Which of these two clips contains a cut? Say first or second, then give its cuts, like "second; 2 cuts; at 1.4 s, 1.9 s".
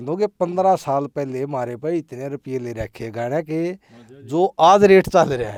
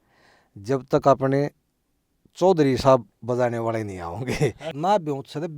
second; 1 cut; at 4.7 s